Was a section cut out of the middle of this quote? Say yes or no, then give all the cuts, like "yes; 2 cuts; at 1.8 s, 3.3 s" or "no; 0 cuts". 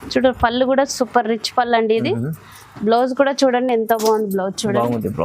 no; 0 cuts